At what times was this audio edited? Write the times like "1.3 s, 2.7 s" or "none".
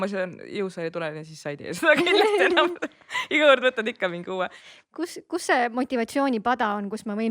4.6 s